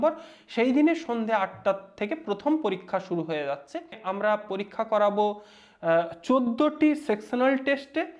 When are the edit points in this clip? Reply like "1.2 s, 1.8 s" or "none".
4.0 s